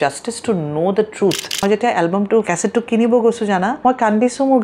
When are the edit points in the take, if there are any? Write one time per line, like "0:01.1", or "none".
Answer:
0:01.6
0:02.5
0:03.7